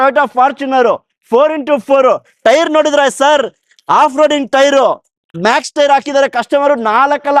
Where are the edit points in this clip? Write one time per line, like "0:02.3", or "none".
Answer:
none